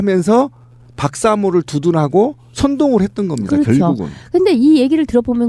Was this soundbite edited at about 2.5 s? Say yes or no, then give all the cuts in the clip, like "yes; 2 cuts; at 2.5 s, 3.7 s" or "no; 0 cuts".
no; 1 cut; at 4.2 s